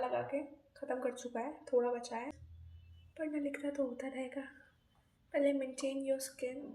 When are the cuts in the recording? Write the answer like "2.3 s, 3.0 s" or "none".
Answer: 2.4 s

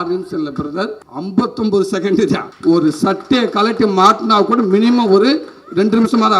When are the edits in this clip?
1.1 s, 2.5 s

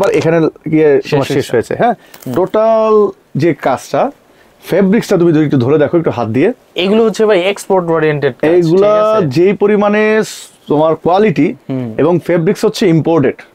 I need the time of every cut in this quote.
none

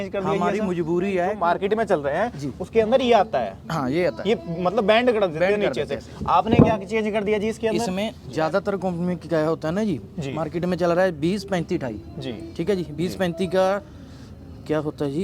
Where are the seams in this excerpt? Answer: 1.4 s, 8.2 s

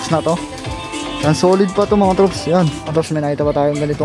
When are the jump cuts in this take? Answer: 2.9 s

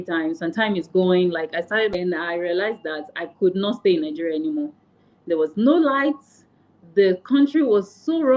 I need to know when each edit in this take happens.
1.9 s

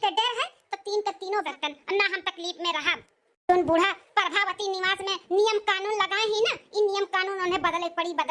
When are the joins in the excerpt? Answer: 1.5 s

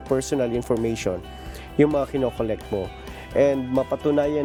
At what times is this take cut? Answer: none

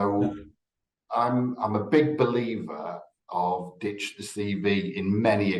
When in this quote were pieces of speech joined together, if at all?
none

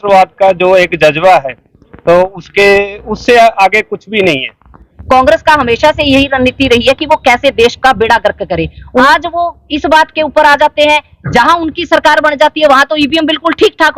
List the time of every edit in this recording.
4.9 s, 9.0 s

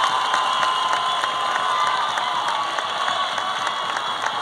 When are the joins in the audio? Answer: none

